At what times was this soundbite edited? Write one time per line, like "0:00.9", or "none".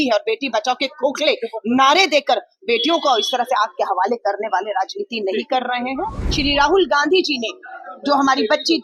0:06.2